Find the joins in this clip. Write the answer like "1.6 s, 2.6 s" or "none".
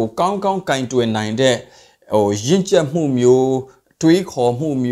none